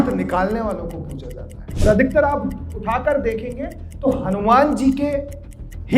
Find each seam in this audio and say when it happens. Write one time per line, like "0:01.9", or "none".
0:01.6